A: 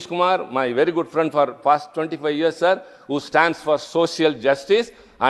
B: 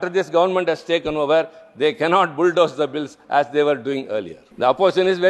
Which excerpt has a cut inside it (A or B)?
B